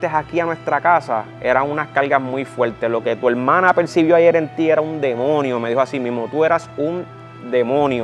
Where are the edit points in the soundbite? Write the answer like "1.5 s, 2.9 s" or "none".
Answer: none

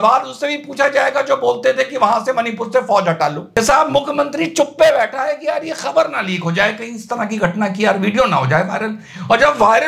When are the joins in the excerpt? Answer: 3.4 s

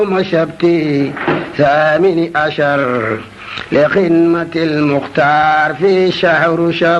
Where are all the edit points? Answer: none

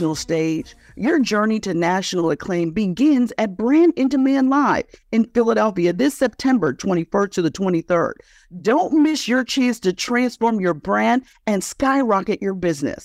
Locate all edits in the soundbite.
none

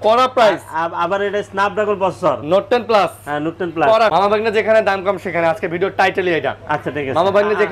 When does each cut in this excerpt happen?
4.1 s

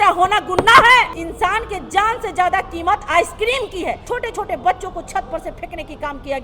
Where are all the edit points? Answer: 1.2 s, 4.0 s

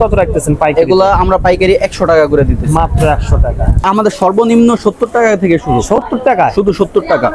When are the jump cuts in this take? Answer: 3.9 s

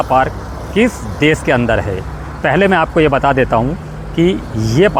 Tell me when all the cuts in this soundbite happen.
none

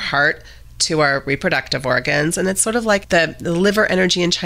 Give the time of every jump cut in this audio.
3.0 s

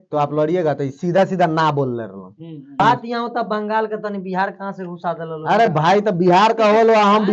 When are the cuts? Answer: 2.8 s

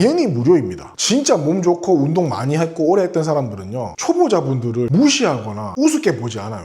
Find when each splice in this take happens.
0.9 s, 4.9 s, 5.6 s

